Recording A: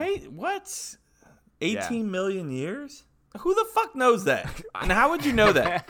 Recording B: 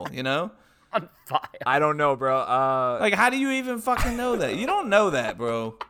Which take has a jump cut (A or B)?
A